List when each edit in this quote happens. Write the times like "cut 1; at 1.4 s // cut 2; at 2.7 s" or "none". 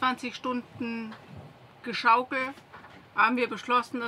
none